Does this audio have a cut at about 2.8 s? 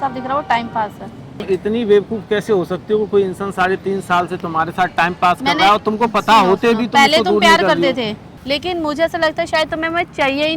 no; 2 cuts; at 1.4 s, 8.3 s

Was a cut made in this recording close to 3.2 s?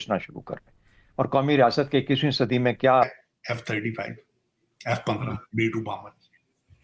yes; 1 cut; at 3.2 s

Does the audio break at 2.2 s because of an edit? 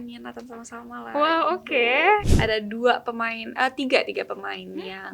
yes; 1 cut; at 2.2 s

